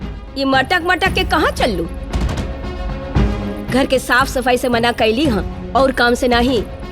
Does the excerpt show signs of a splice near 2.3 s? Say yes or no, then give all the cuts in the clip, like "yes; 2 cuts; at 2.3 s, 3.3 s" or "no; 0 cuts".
no; 0 cuts